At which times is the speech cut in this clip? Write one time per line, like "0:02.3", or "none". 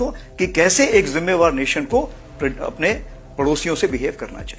none